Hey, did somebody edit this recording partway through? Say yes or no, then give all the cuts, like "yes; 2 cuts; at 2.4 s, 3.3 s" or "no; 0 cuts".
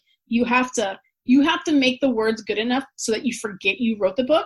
no; 0 cuts